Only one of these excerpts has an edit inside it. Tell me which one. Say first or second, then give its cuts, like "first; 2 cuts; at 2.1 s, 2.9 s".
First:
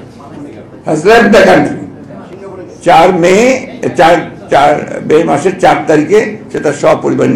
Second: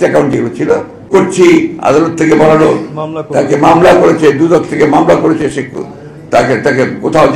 second; 1 cut; at 1.0 s